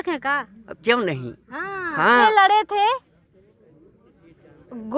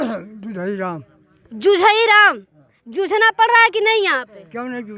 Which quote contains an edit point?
first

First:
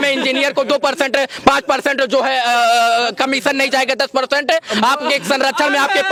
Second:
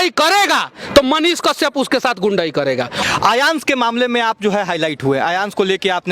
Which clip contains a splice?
second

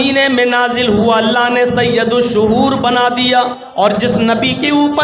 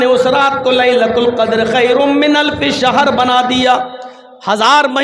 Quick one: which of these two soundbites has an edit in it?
first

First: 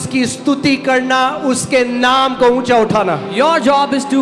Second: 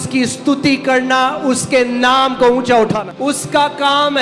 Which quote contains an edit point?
second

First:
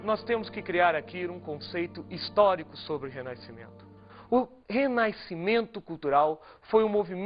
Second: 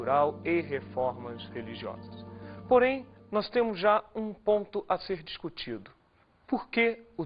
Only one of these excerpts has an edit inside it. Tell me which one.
second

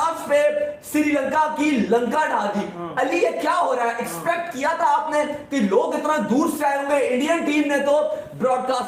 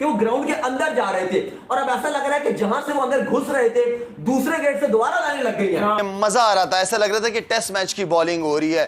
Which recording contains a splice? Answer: second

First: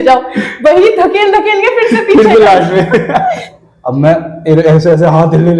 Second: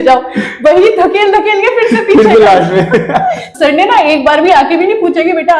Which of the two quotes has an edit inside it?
first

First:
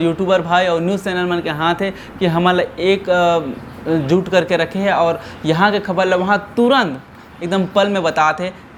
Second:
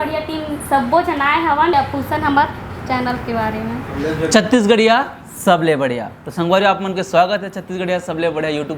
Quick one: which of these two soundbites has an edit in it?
second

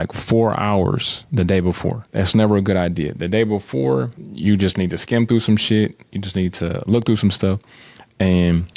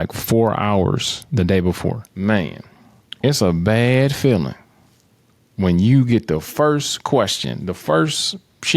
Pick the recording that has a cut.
second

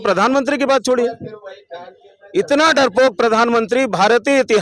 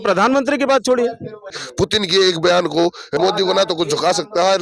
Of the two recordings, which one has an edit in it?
second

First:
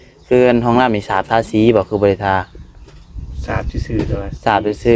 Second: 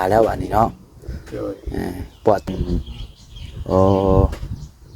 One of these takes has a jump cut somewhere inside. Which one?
second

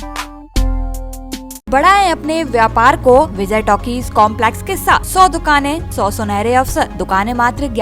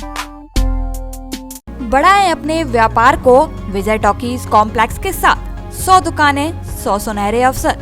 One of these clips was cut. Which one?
first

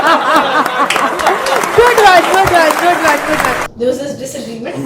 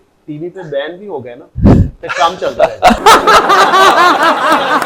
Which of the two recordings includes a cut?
first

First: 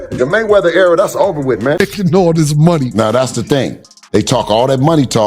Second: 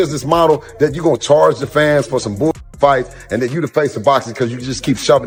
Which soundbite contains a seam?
first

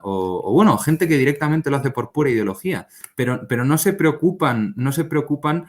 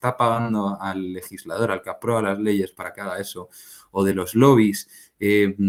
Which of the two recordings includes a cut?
first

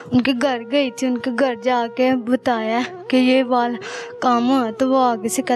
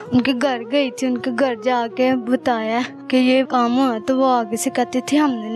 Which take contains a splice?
second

